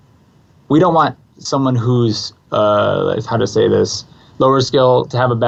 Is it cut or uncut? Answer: uncut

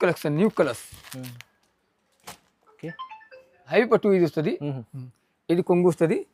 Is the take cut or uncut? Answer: cut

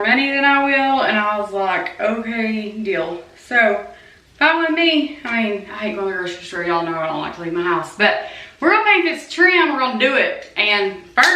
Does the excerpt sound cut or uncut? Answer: uncut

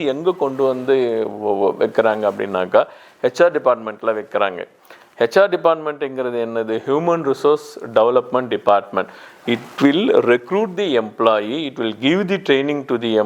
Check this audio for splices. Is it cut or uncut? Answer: uncut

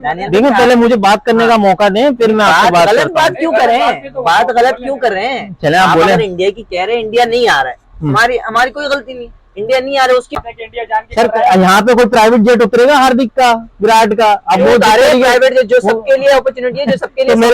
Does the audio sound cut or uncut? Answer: cut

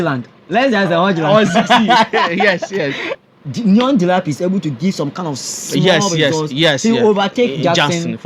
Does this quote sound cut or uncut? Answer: cut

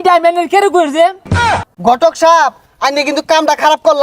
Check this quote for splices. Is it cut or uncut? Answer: cut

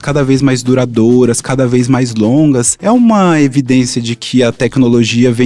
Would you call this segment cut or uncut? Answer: uncut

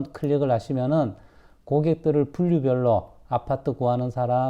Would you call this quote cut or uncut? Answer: uncut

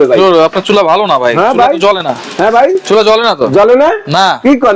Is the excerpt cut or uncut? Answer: uncut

